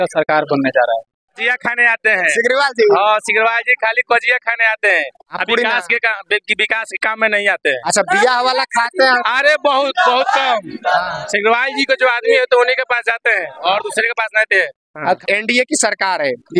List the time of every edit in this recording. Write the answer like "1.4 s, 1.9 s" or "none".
1.4 s, 15.2 s